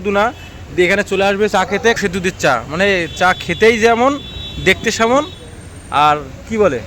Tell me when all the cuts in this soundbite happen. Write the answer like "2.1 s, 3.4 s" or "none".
2.0 s

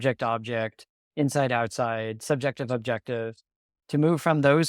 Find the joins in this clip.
3.7 s

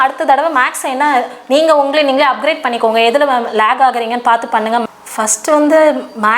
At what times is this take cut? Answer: 4.8 s

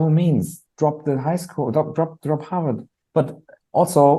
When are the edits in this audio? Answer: 2.9 s

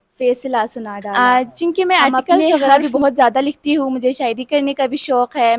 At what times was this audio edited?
1.1 s

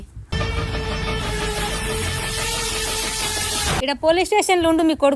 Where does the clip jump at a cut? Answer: 3.8 s

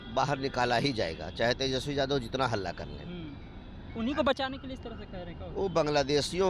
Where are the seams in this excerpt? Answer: none

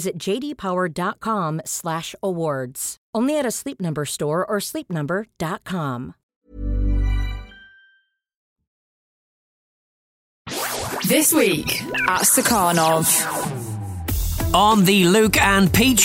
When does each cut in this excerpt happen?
none

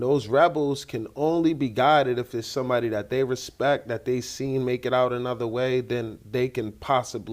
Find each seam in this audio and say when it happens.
none

